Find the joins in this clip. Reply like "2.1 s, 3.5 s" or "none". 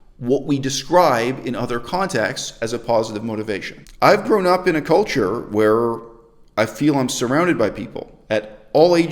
3.8 s